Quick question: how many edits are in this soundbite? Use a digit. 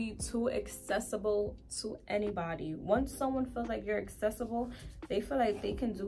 0